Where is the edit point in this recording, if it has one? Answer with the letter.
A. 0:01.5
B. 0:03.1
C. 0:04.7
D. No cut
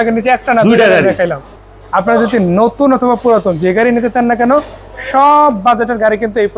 A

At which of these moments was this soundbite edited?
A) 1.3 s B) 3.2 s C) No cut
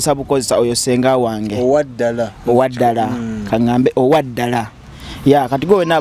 C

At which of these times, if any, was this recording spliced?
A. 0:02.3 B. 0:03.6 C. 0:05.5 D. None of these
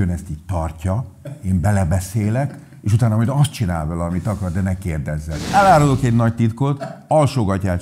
C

